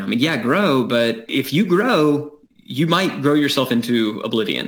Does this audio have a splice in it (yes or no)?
yes